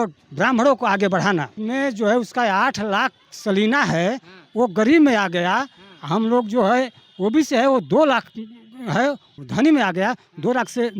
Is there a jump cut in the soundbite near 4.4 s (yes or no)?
no